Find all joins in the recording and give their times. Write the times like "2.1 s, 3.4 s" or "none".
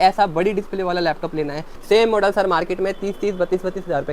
1.7 s